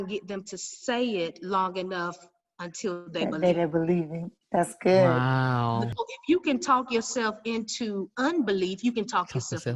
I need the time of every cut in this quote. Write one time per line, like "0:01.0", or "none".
0:05.9